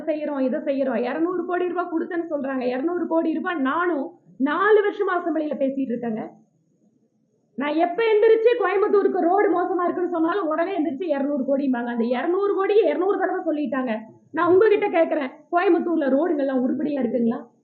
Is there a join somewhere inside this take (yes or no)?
no